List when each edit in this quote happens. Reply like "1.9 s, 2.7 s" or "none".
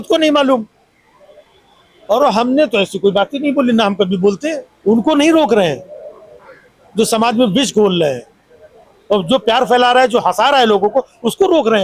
4.7 s